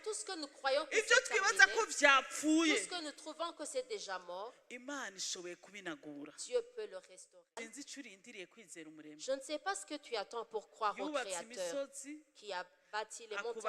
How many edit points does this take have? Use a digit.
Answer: 1